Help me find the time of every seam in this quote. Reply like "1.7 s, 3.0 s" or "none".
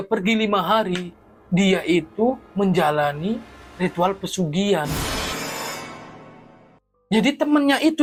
none